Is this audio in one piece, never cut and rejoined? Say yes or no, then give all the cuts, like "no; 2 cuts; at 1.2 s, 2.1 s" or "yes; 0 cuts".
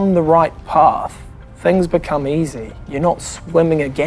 yes; 0 cuts